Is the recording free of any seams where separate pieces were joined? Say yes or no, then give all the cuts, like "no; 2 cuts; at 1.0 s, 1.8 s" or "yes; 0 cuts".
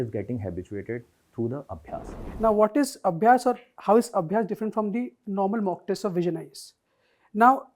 no; 1 cut; at 2.2 s